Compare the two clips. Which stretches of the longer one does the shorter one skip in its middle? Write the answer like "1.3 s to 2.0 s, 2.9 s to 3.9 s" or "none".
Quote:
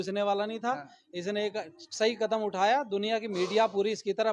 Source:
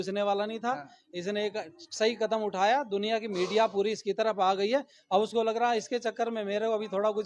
none